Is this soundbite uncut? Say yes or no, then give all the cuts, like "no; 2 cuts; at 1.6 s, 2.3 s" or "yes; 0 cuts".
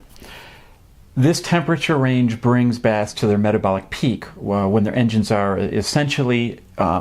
no; 1 cut; at 4.9 s